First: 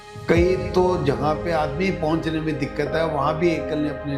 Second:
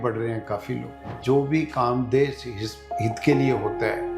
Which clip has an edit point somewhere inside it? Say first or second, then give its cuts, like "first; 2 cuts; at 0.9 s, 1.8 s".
second; 1 cut; at 1.2 s